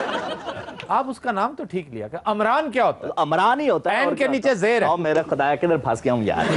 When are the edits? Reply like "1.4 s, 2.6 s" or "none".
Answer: none